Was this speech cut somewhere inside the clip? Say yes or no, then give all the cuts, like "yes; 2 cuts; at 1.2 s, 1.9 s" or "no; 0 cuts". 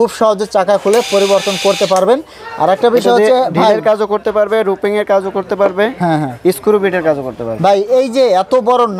no; 0 cuts